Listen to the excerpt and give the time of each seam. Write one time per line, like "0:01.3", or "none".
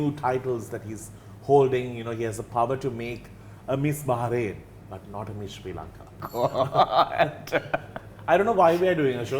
0:06.2